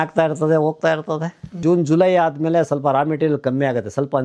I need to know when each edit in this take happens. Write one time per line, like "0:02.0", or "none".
0:01.6

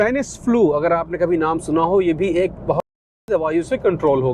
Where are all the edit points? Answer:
0:03.2

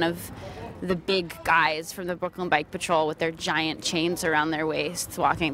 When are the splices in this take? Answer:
none

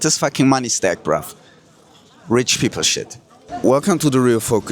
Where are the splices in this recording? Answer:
0:03.5

